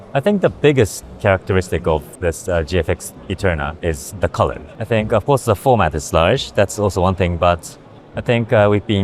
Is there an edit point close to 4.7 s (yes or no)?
yes